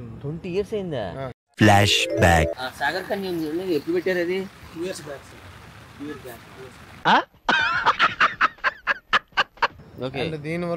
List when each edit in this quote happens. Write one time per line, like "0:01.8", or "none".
0:09.8